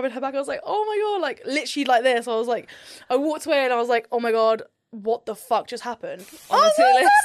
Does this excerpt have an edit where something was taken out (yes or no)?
yes